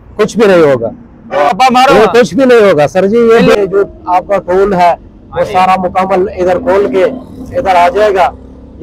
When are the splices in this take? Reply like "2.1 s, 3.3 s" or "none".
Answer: 1.5 s, 3.6 s